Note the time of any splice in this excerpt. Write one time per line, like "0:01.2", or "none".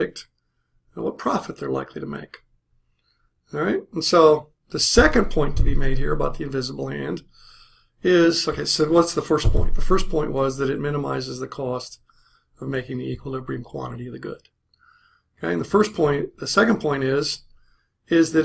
0:13.9